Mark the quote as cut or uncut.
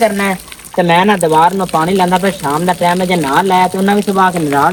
uncut